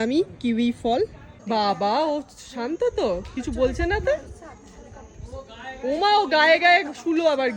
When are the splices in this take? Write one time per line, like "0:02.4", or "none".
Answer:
0:01.3